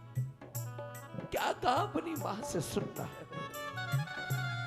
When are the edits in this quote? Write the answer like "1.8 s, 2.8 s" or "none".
3.3 s